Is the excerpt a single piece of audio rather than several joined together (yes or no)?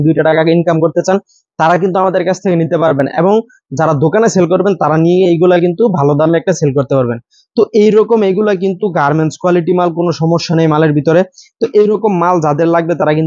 yes